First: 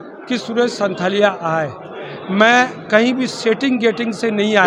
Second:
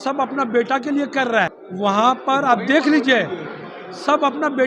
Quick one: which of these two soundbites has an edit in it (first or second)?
second